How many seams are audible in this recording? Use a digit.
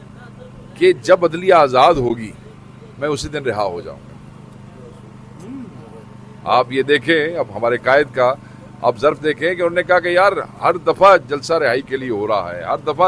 0